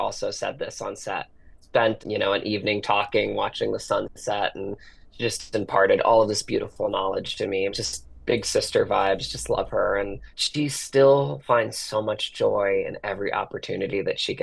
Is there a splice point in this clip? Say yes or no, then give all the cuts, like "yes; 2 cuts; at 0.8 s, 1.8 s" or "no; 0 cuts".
no; 0 cuts